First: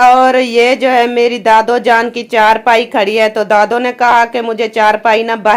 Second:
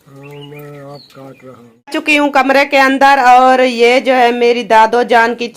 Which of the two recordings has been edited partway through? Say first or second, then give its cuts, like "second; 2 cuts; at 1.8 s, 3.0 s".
second; 1 cut; at 1.7 s